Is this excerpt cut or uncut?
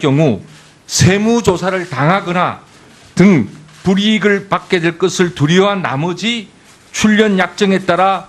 uncut